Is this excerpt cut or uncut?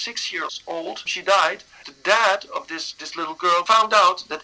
cut